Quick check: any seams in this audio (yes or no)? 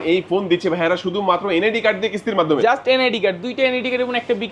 no